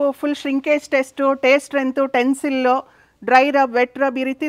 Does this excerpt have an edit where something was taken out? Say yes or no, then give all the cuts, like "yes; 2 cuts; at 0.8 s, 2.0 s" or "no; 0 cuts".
no; 0 cuts